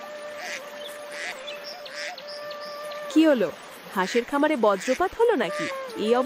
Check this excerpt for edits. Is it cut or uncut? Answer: cut